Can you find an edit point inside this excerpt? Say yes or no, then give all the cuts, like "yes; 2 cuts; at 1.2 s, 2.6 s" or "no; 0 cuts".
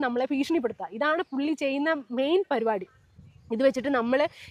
no; 0 cuts